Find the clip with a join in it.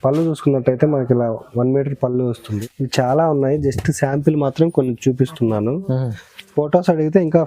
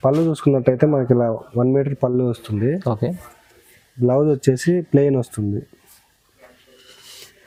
first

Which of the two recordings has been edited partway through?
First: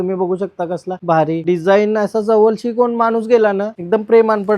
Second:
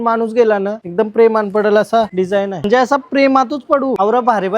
second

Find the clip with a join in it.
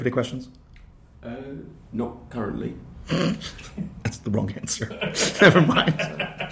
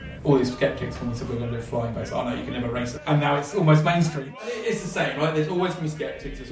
second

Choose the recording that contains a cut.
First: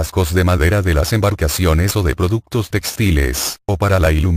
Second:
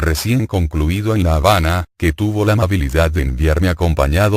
second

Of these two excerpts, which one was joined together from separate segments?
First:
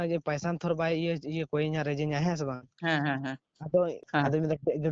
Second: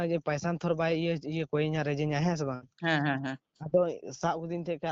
first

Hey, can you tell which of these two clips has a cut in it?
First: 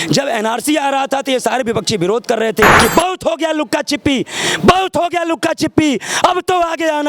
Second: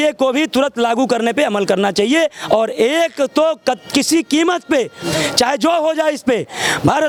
first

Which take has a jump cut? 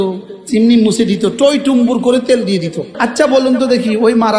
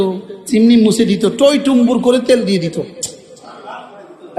first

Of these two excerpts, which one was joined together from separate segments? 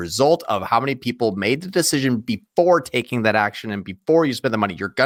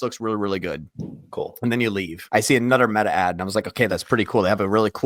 second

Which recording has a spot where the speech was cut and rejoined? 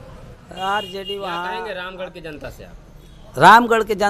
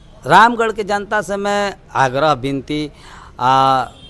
first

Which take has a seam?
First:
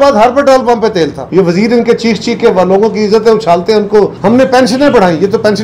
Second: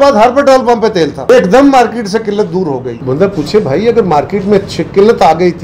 first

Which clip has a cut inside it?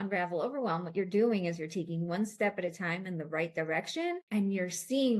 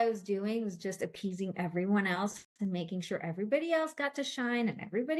first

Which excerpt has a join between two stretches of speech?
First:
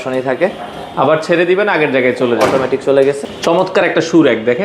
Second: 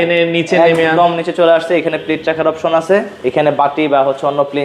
first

